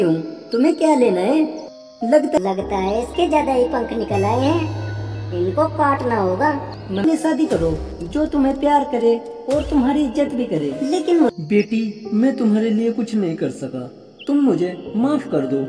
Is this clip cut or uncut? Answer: cut